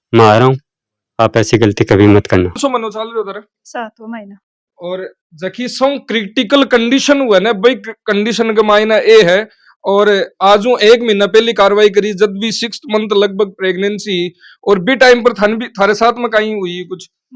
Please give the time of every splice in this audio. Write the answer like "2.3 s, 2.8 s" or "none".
2.6 s